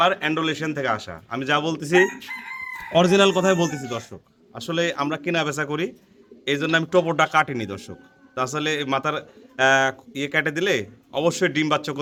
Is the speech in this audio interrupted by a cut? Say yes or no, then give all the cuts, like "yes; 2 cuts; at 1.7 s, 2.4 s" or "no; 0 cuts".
no; 0 cuts